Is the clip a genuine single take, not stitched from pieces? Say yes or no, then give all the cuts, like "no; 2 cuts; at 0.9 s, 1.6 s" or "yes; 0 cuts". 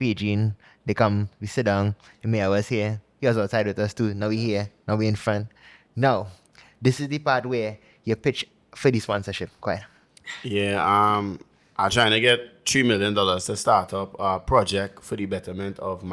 yes; 0 cuts